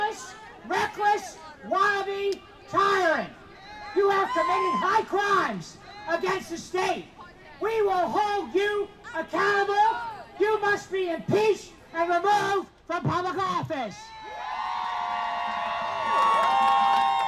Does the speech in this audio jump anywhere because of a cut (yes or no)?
no